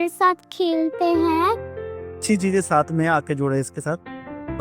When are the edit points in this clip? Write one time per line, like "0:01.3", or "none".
0:02.2